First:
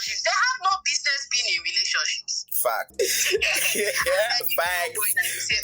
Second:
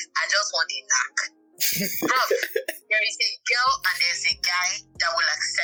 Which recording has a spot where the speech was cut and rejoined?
first; 1 cut; at 2.9 s

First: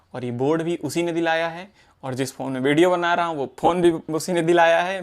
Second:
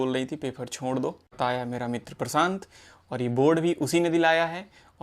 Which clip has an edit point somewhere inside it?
second; 1 cut; at 1.3 s

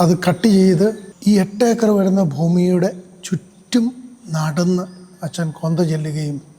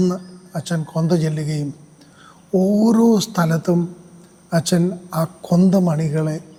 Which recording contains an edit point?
first; 1 cut; at 1.1 s

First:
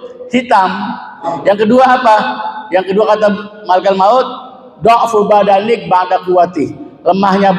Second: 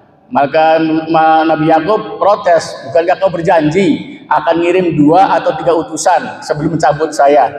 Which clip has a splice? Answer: first; 1 cut; at 1.3 s

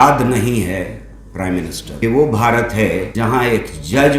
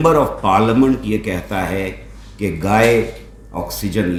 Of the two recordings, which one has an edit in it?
first; 2 cuts; at 2.0 s, 3.1 s

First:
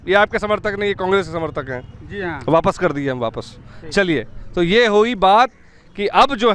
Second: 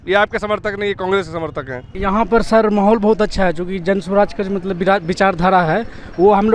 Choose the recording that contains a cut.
second; 1 cut; at 1.9 s

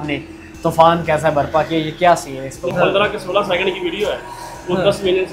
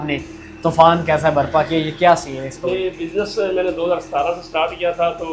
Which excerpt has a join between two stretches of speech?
first; 1 cut; at 2.7 s

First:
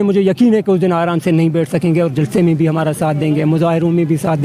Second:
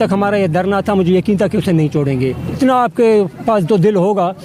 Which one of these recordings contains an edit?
second; 1 cut; at 2.5 s

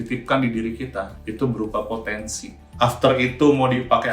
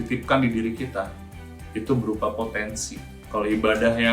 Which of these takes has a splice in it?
first; 2 cuts; at 1.2 s, 2.6 s

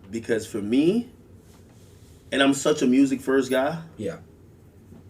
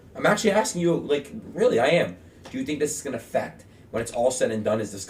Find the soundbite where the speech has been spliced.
first; 1 cut; at 3.1 s

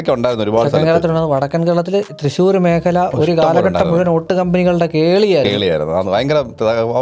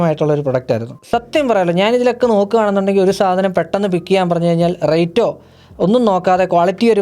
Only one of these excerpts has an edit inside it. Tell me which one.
second; 1 cut; at 0.9 s

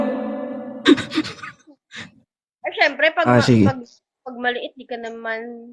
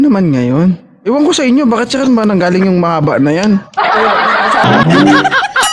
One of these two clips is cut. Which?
second; 1 cut; at 4.6 s

